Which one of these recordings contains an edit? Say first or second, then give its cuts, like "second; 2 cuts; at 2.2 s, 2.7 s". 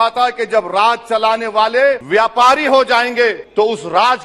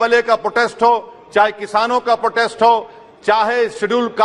first; 2 cuts; at 2.0 s, 3.4 s